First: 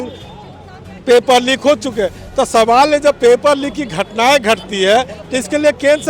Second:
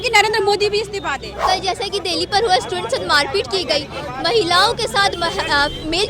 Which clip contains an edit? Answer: second; 1 cut; at 1.3 s

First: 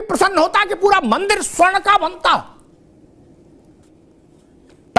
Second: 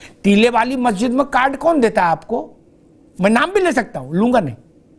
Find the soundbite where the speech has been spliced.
first; 1 cut; at 3.8 s

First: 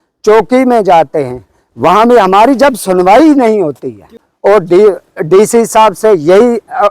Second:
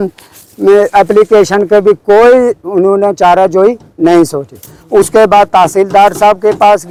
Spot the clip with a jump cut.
first; 1 cut; at 4.2 s

